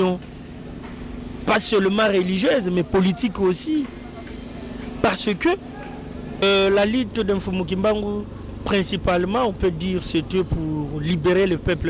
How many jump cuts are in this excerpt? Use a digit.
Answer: 1